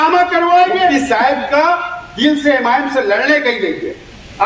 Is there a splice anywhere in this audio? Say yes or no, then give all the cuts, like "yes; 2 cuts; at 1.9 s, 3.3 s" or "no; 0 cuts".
yes; 1 cut; at 0.9 s